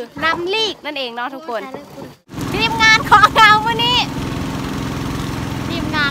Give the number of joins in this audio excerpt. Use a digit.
1